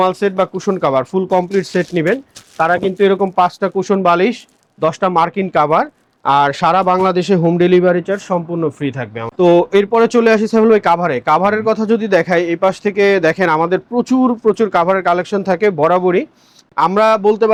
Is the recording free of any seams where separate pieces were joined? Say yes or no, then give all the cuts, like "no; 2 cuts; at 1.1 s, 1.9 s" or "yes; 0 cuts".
yes; 0 cuts